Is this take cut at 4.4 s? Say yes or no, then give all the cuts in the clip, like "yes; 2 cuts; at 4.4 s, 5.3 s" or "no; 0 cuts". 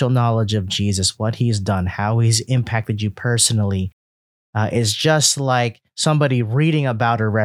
no; 1 cut; at 1.1 s